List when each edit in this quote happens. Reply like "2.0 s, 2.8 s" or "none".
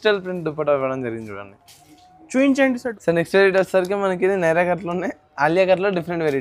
2.9 s